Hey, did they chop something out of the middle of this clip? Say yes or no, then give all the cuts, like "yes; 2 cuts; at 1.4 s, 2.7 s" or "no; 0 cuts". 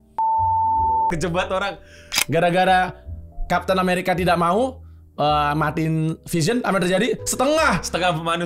yes; 1 cut; at 2.1 s